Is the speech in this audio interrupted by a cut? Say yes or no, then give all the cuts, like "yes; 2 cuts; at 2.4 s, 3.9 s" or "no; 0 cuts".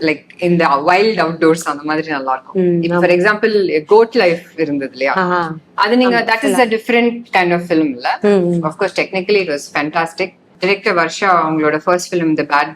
yes; 1 cut; at 10.5 s